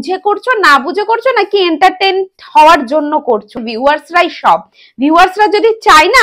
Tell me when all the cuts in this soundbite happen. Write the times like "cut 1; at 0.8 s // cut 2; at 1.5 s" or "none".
cut 1; at 3.6 s